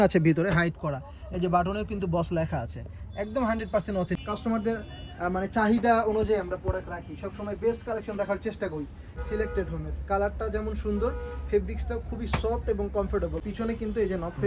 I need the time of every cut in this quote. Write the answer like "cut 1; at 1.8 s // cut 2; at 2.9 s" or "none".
cut 1; at 4.2 s // cut 2; at 9.2 s // cut 3; at 13.4 s